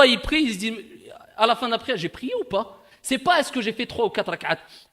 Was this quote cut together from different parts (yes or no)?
no